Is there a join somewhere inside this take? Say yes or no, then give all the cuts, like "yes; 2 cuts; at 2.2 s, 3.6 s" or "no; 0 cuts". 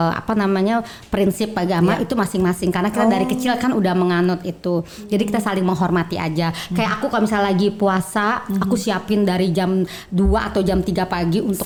no; 0 cuts